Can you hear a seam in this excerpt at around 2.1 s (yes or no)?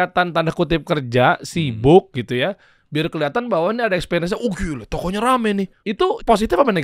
no